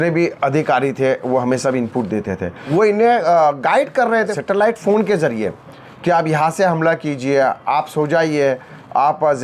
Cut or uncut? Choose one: cut